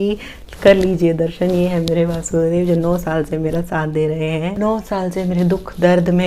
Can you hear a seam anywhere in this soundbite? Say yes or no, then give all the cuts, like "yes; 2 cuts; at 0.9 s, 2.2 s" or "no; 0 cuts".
yes; 1 cut; at 4.6 s